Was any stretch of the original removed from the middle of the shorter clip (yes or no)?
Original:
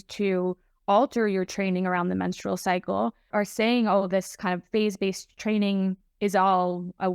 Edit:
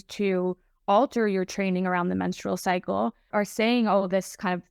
no